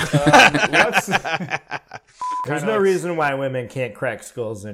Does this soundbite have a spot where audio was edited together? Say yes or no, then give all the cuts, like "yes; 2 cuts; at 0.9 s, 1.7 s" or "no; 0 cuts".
yes; 1 cut; at 2.5 s